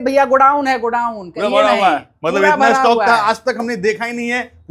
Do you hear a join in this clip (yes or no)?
no